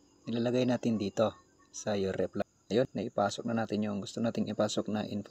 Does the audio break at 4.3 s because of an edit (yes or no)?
no